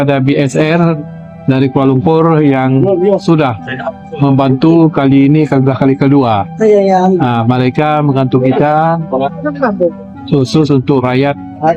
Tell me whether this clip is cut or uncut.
uncut